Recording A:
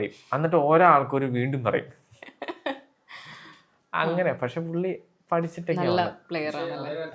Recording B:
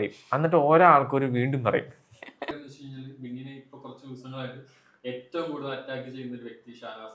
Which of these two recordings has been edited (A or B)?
B